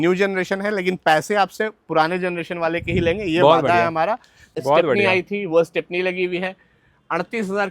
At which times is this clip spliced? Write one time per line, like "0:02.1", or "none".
0:04.4

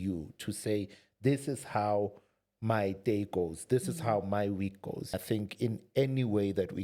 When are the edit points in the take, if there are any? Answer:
0:05.1

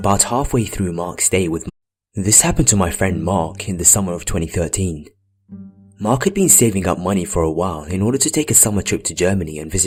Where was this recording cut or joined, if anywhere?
none

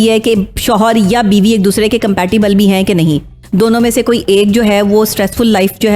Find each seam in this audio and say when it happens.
0:03.4

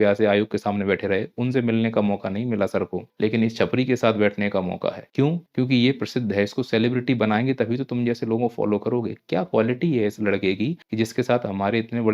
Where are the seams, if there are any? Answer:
0:03.0
0:05.2
0:10.8

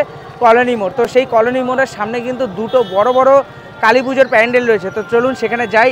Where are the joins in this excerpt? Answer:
none

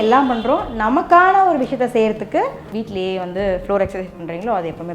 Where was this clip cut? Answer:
0:02.6

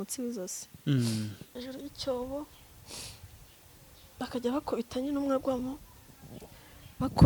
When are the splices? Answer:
0:01.6

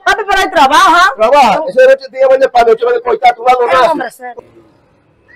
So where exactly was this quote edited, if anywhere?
0:04.2

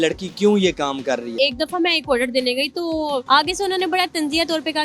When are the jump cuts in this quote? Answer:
0:01.3
0:03.2

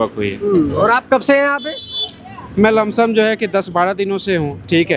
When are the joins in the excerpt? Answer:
none

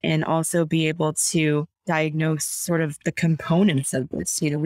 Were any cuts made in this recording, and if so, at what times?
0:01.7

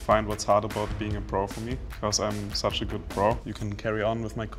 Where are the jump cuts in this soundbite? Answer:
0:01.9
0:03.5

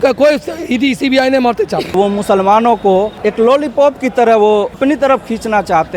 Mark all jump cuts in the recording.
0:01.9
0:03.1
0:04.8

